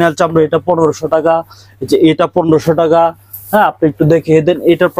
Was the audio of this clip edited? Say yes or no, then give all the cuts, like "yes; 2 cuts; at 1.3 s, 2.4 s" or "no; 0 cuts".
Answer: no; 0 cuts